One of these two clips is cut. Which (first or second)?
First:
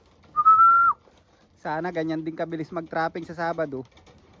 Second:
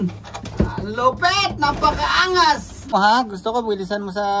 second